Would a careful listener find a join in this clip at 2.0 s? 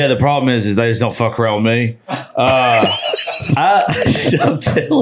no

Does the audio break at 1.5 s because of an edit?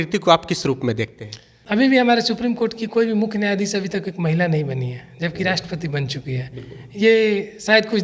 yes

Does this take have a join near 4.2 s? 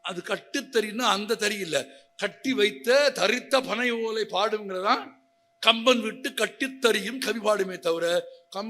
no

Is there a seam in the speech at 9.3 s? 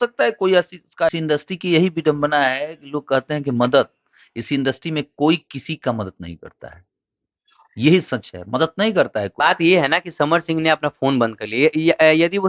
yes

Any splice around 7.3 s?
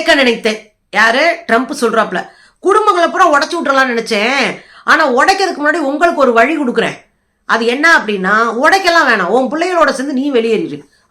no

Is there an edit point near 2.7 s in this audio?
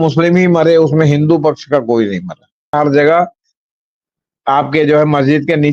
yes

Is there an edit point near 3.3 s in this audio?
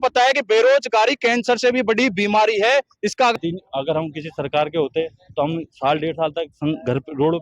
yes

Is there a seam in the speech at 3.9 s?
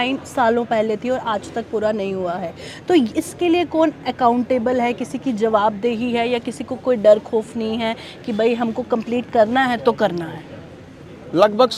no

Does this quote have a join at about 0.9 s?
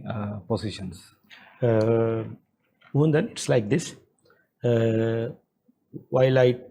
no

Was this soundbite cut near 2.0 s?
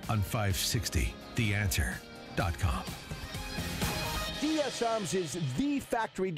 no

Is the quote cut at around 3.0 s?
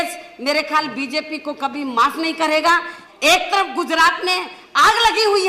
yes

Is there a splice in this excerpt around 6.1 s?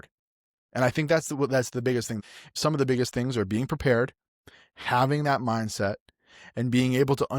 no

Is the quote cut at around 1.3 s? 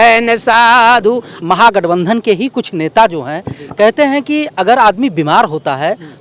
yes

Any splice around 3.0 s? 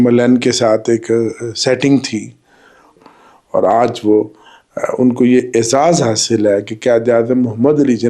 yes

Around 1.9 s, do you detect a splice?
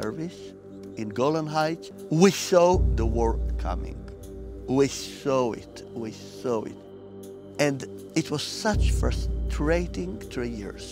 yes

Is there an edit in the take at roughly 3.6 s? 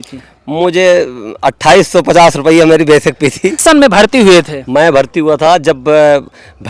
yes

